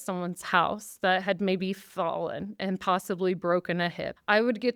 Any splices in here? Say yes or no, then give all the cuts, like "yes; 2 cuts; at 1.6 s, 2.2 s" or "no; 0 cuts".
no; 0 cuts